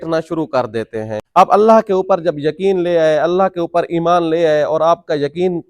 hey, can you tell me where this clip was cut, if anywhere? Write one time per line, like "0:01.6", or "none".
0:01.2